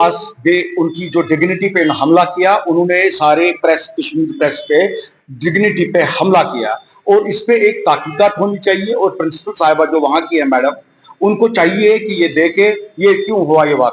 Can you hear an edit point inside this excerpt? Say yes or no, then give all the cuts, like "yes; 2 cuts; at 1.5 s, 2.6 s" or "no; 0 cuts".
no; 0 cuts